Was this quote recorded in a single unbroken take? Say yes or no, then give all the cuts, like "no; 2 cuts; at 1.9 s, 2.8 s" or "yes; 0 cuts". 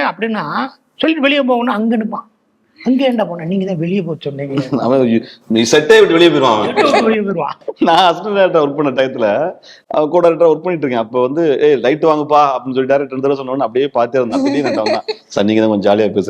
no; 1 cut; at 7.6 s